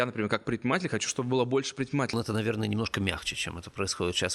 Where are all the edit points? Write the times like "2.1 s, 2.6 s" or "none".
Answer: 2.1 s